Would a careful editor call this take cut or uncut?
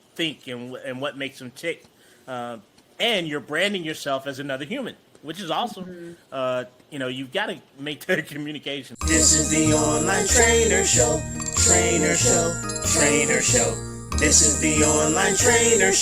cut